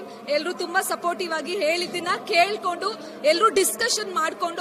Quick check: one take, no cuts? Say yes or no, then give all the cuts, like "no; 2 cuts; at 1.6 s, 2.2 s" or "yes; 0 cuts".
yes; 0 cuts